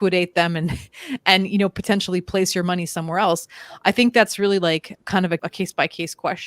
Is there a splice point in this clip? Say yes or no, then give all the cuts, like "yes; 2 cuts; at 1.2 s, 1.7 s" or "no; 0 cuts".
yes; 1 cut; at 5.4 s